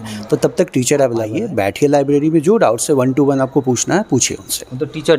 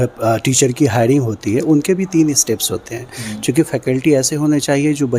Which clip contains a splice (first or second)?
first